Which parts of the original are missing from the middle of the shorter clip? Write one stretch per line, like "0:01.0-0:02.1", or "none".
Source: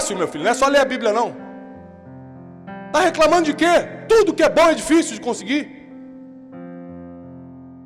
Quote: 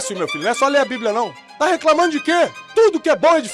0:01.4-0:02.8